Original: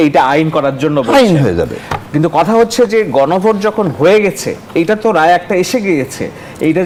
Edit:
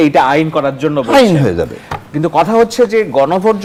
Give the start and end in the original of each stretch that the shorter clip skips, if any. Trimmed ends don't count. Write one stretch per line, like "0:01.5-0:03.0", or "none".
none